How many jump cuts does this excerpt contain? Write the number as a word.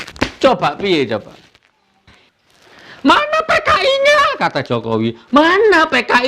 one